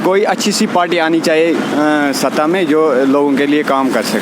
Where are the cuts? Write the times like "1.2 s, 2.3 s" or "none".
none